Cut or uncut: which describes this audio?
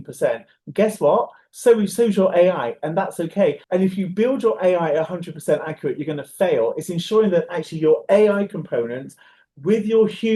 uncut